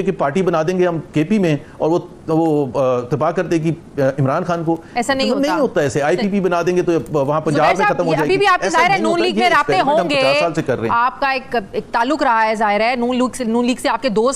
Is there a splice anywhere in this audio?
no; 0 cuts

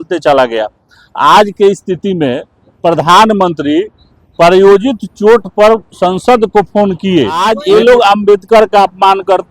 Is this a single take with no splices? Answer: no; 1 cut; at 7.4 s

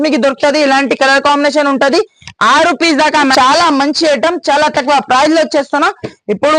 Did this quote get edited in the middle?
yes; 1 cut; at 3.3 s

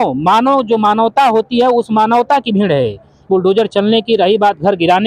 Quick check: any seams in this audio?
yes; 1 cut; at 3.2 s

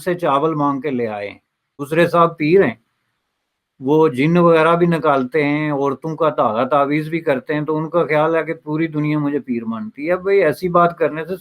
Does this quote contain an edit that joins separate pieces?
yes; 1 cut; at 1.8 s

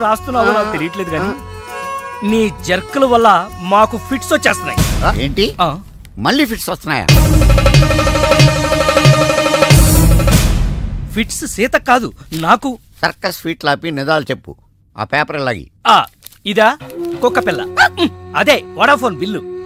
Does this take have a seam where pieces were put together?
no; 0 cuts

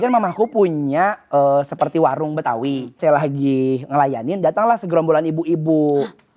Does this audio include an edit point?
yes; 1 cut; at 3.0 s

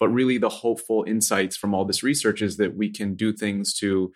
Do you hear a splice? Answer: no; 0 cuts

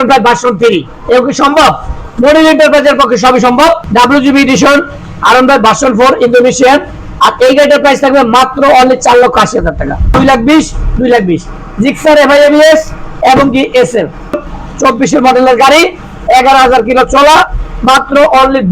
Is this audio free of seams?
no; 3 cuts; at 3.8 s, 10.1 s, 14.5 s

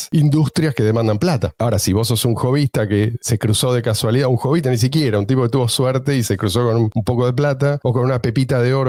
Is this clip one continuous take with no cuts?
yes; 0 cuts

